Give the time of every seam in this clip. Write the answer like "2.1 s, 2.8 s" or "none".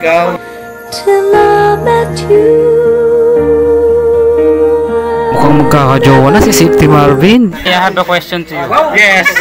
7.7 s